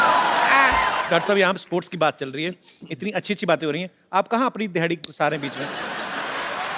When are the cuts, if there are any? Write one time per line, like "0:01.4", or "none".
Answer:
0:01.0

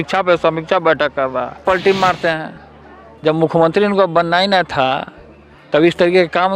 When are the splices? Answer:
0:01.6

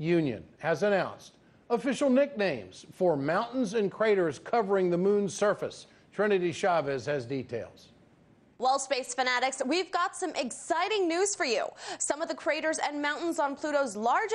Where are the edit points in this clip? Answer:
0:11.8

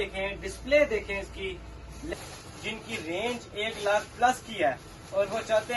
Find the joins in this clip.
0:02.1

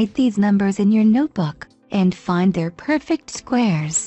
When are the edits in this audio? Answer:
0:02.8

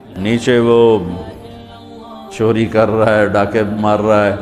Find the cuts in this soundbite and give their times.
none

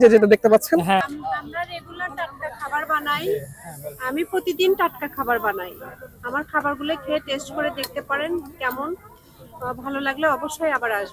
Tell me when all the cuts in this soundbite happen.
0:01.0

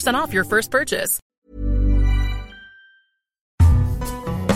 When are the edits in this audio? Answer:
0:01.2
0:03.5

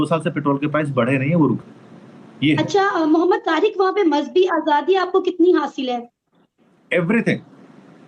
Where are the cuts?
0:01.6

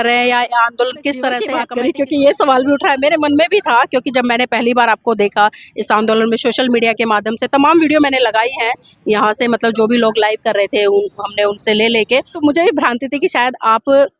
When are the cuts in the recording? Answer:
0:01.6
0:12.3

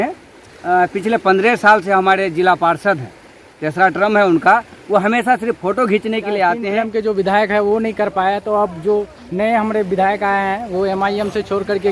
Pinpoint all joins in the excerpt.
0:06.8

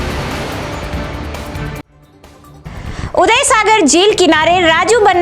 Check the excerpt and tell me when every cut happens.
0:02.0

